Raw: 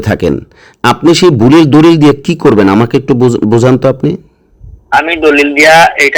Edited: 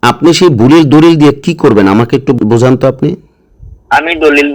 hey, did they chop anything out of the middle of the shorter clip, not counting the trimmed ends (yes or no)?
yes